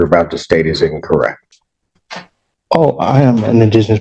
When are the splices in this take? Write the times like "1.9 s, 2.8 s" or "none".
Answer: none

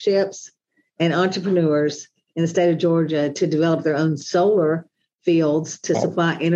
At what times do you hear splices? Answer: none

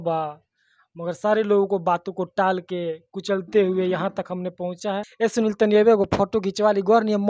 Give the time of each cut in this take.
5.0 s

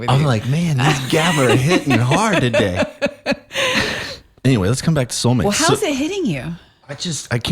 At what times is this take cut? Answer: 4.1 s

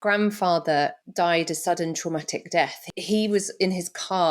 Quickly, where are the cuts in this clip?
1.0 s, 2.9 s

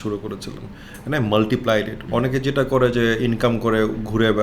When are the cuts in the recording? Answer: 2.0 s

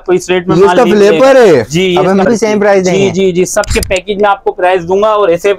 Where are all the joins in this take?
2.3 s

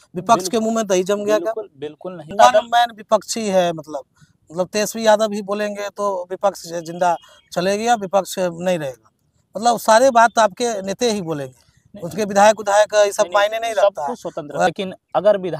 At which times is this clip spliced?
2.3 s, 14.7 s

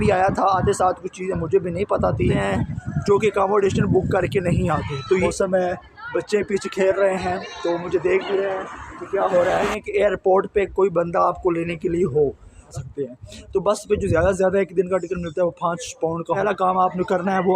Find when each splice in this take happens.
2.3 s, 5.2 s, 9.8 s, 12.7 s, 16.4 s

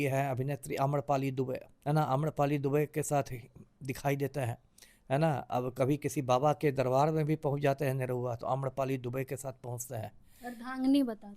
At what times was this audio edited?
1.7 s

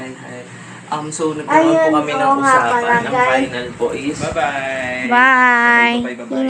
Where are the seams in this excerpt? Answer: 4.2 s

